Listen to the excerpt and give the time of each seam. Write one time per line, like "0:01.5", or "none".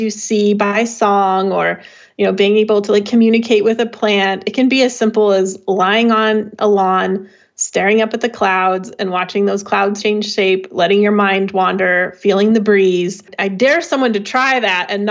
0:10.0
0:13.3